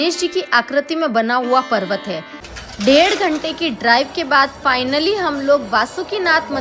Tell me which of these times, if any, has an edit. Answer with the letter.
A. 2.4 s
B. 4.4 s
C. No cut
A